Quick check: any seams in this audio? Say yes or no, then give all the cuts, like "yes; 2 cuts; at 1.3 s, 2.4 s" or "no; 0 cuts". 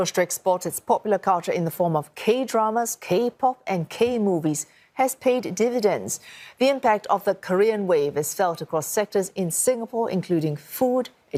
no; 0 cuts